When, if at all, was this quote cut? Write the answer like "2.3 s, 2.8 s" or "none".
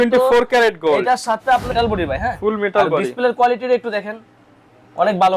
1.7 s